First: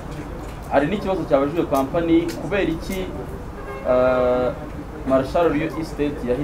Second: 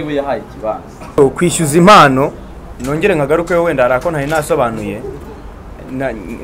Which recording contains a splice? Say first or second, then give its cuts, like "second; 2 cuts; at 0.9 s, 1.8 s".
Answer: second; 1 cut; at 1.2 s